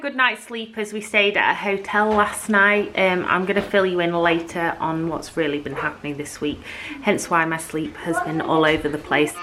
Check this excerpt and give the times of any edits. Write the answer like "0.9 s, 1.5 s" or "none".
none

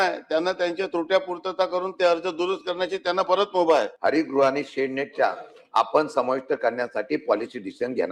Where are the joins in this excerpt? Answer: 3.9 s

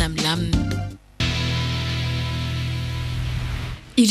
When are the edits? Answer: 1.1 s

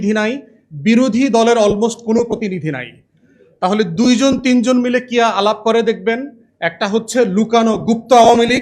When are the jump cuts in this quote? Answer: none

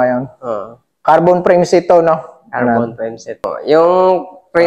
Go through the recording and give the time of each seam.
3.5 s

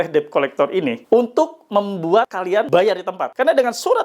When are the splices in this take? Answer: 1.0 s, 2.7 s

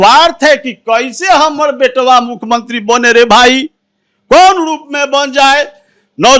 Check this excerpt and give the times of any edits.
none

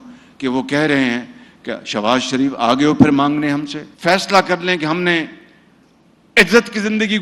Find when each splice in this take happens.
3.8 s

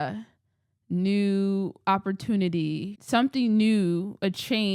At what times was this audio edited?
2.9 s

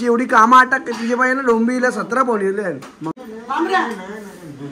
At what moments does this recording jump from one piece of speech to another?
3.1 s

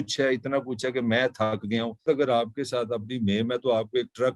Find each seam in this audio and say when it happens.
2.0 s

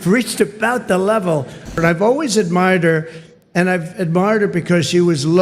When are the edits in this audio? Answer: 1.8 s

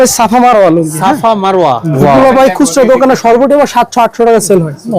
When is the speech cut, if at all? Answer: 1.9 s

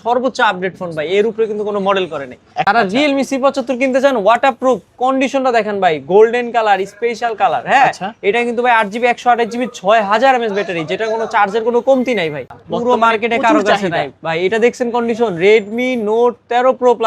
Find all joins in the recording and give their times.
2.7 s, 12.5 s

